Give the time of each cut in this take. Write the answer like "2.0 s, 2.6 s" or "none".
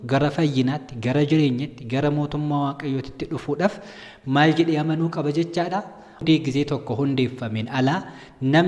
6.2 s